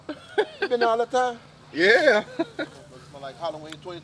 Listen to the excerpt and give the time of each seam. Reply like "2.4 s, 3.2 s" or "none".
none